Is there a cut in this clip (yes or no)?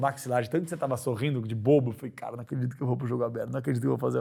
no